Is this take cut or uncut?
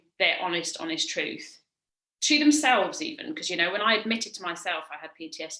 uncut